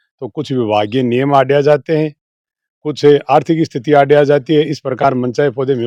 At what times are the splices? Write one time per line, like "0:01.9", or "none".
none